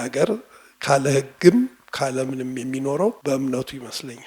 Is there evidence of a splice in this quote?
yes; 1 cut; at 3.2 s

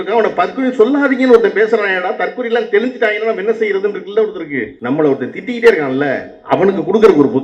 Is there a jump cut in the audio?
yes; 1 cut; at 4.7 s

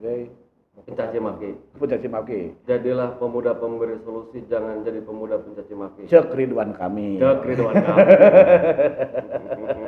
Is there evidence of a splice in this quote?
no; 0 cuts

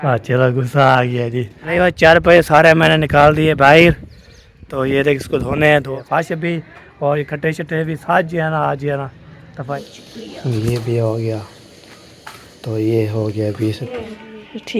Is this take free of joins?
no; 4 cuts; at 1.6 s, 6.0 s, 9.7 s, 13.8 s

